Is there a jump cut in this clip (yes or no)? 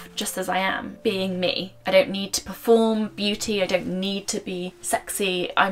yes